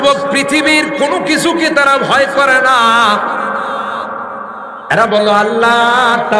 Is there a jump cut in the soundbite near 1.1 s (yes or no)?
no